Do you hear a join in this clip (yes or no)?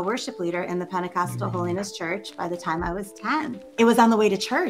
yes